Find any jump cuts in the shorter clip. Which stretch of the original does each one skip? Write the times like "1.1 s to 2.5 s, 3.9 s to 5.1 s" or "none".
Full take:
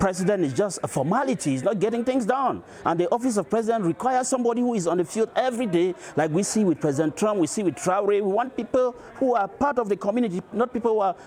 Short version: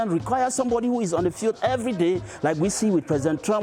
none